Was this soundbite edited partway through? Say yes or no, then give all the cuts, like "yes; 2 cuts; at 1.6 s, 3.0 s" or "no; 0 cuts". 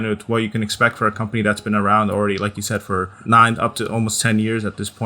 yes; 1 cut; at 3.1 s